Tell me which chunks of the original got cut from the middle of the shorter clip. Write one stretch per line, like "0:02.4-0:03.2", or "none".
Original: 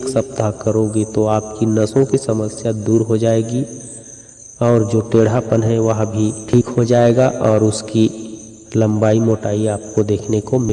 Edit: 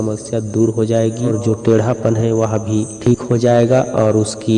0:03.6-0:04.8